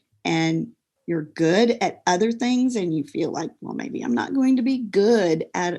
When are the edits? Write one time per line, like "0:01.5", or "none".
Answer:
none